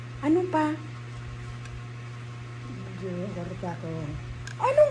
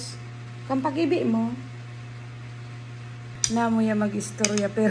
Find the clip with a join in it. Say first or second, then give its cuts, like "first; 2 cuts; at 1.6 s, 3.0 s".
second; 1 cut; at 3.4 s